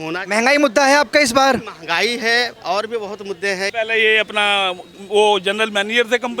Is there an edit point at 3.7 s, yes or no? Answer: yes